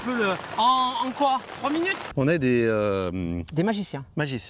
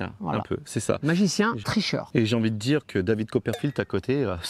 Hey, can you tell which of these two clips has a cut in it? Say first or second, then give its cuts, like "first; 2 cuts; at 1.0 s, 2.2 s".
first; 1 cut; at 2.0 s